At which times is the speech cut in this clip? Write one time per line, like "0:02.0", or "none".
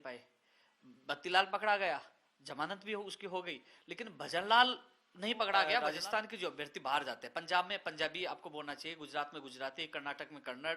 0:05.8